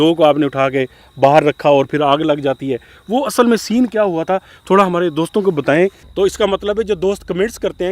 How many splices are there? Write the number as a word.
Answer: one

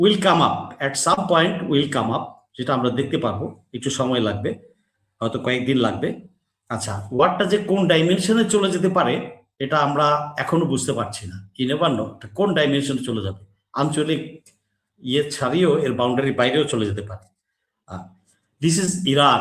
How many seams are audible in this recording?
zero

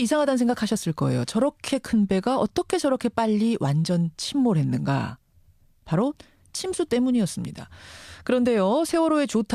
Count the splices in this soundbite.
zero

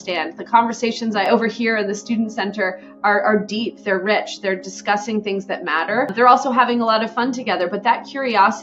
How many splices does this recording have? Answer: zero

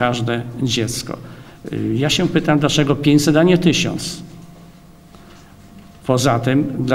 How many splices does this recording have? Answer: zero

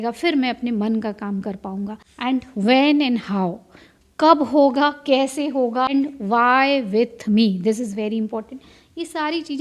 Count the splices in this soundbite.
two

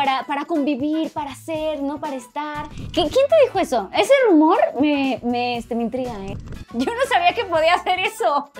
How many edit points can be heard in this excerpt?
two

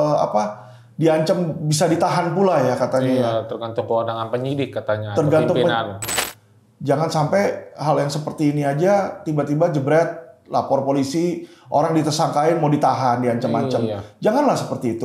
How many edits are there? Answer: one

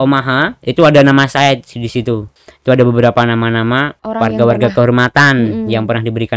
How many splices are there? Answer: two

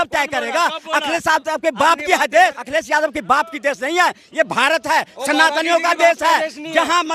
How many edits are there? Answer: one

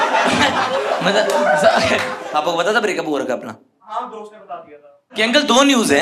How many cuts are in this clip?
two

